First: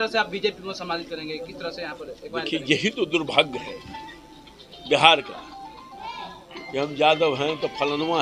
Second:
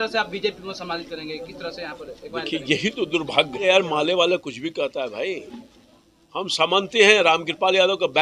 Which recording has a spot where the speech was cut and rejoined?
second; 1 cut; at 3.6 s

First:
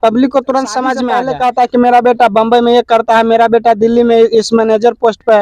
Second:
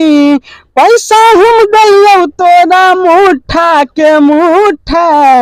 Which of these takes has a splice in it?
first; 1 cut; at 1.0 s

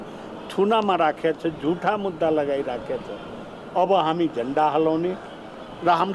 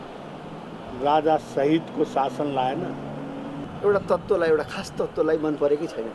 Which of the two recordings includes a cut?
second; 1 cut; at 3.6 s

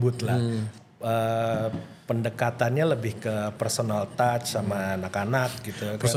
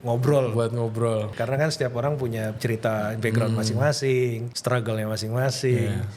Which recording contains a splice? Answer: second; 3 cuts; at 1.3 s, 2.5 s, 4.5 s

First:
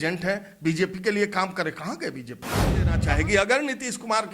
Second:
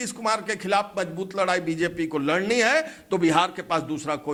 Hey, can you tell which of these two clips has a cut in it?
first; 1 cut; at 2.8 s

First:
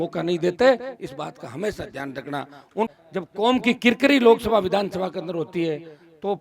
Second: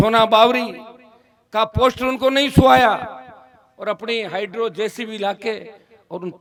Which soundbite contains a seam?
first; 1 cut; at 2.9 s

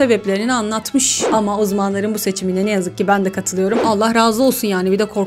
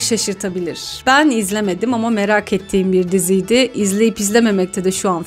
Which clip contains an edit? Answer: first; 2 cuts; at 1.3 s, 3.8 s

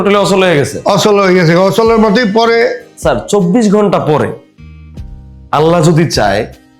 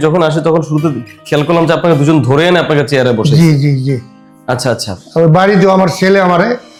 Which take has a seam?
first; 1 cut; at 2.9 s

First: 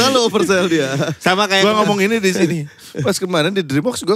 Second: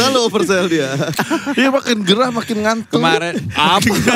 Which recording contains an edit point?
second; 1 cut; at 1.1 s

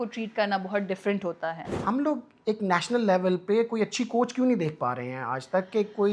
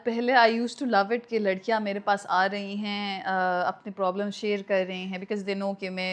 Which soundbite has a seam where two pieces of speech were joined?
first; 1 cut; at 1.7 s

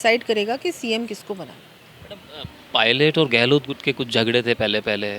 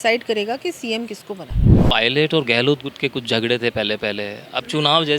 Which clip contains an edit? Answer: second; 1 cut; at 1.7 s

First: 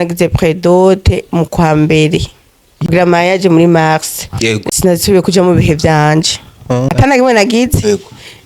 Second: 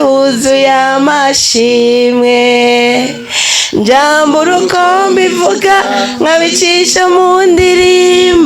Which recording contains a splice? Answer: first; 3 cuts; at 2.9 s, 4.6 s, 6.9 s

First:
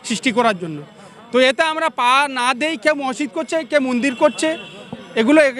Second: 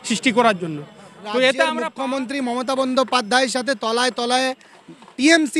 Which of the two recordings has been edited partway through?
second; 1 cut; at 1.9 s

